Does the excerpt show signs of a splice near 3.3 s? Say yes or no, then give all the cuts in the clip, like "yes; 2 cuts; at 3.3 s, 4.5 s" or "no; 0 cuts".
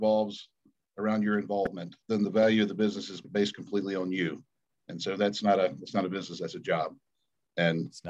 yes; 2 cuts; at 2.1 s, 3.3 s